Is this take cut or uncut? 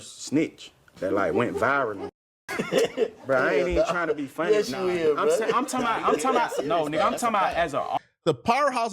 cut